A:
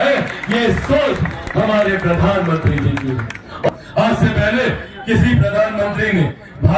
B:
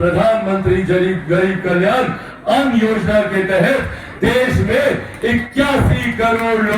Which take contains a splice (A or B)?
A